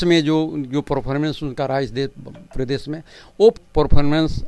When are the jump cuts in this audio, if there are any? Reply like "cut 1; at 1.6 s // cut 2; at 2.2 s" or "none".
cut 1; at 3.6 s